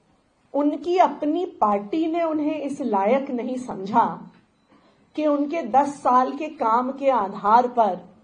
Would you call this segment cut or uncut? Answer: uncut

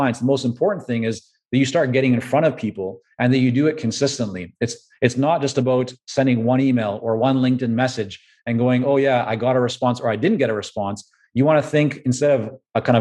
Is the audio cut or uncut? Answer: uncut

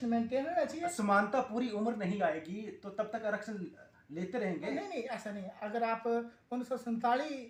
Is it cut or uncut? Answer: uncut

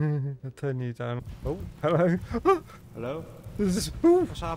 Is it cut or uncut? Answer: cut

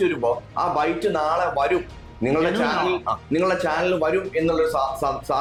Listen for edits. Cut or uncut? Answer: uncut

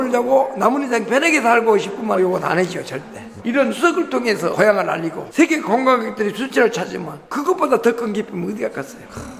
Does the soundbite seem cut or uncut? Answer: uncut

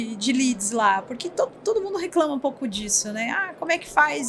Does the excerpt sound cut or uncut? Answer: uncut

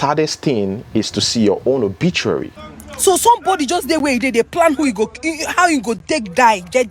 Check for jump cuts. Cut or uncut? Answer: cut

